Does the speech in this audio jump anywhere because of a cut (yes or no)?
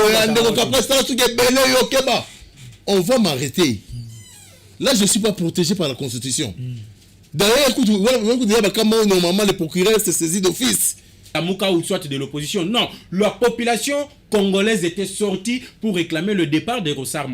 yes